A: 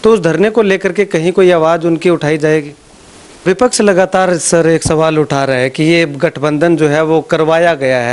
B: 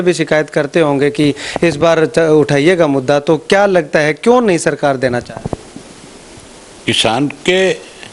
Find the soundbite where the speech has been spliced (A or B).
A